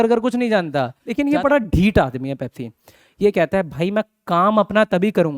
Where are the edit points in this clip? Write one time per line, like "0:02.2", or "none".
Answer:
0:01.0